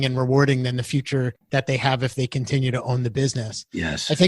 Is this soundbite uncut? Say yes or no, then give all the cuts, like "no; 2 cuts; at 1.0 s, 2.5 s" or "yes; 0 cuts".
no; 1 cut; at 1.4 s